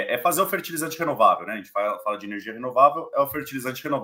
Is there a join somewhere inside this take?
no; 0 cuts

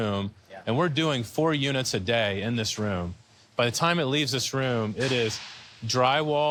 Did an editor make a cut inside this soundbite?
no; 0 cuts

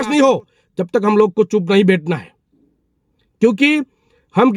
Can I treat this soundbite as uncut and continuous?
yes; 0 cuts

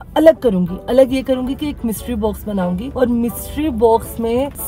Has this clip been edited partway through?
no; 0 cuts

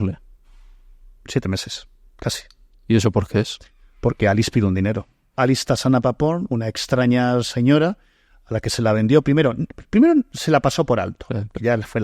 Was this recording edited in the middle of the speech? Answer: no; 0 cuts

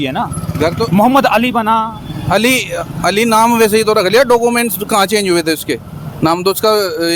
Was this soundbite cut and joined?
no; 0 cuts

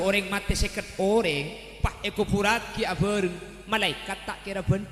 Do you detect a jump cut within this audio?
no; 0 cuts

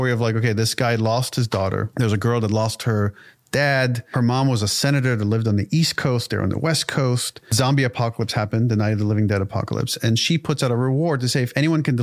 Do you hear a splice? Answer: yes; 3 cuts; at 1.9 s, 4.0 s, 7.5 s

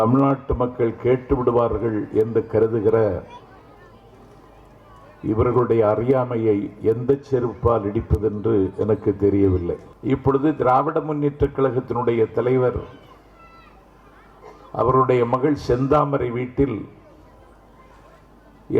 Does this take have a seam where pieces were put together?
yes; 1 cut; at 9.9 s

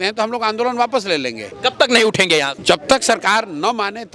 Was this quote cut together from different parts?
yes; 2 cuts; at 1.4 s, 2.5 s

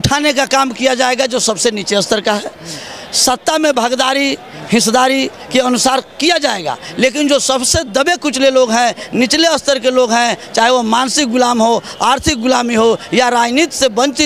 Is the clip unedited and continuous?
yes; 0 cuts

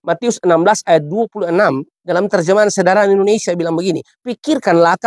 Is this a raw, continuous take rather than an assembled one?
no; 1 cut; at 1.9 s

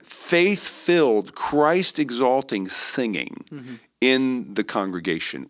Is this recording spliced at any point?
no; 0 cuts

